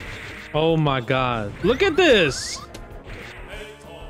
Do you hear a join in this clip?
yes; 1 cut; at 1.5 s

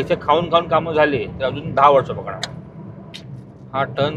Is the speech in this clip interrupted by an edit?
yes; 1 cut; at 3.2 s

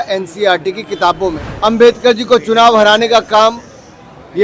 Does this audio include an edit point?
yes; 1 cut; at 1.5 s

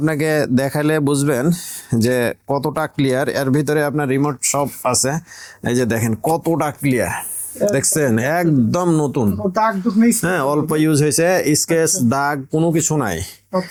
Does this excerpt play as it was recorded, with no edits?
yes; 0 cuts

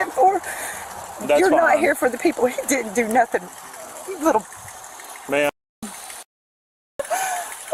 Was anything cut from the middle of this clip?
no; 0 cuts

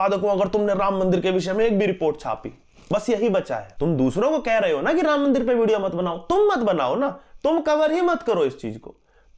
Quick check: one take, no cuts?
no; 1 cut; at 3.7 s

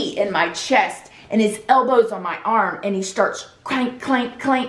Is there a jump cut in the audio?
no; 0 cuts

